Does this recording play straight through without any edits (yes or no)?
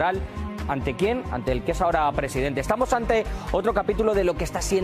yes